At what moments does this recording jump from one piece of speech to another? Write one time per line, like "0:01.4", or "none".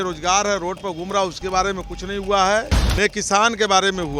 0:02.8